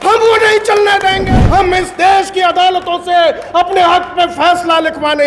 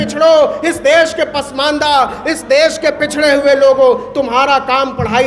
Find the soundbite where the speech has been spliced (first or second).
first